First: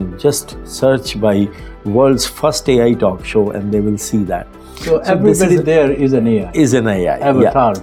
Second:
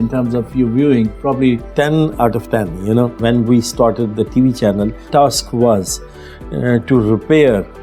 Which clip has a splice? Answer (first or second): second